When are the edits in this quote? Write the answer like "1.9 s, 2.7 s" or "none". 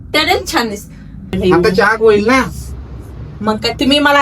1.3 s